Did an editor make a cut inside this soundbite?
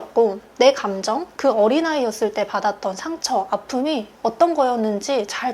yes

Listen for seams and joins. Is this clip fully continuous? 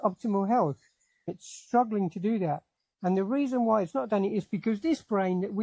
no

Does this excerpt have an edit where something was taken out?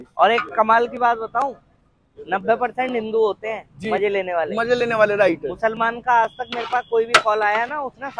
no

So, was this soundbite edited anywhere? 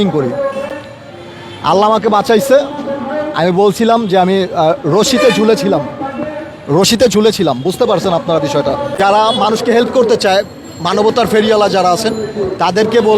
yes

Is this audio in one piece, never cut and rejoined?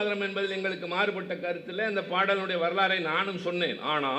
yes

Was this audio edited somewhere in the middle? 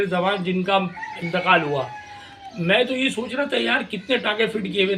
no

